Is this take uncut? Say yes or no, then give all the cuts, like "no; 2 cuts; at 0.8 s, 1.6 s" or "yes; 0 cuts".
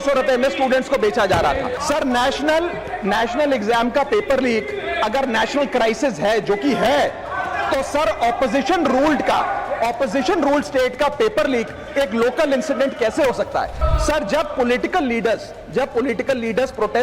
no; 2 cuts; at 1.7 s, 13.8 s